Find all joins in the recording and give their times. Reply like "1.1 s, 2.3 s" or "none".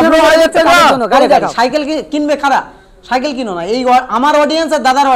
1.4 s